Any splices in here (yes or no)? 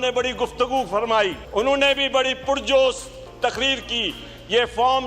yes